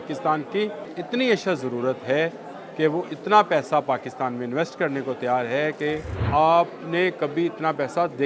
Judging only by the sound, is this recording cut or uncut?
cut